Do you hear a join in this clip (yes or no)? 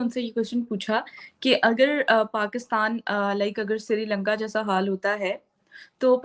no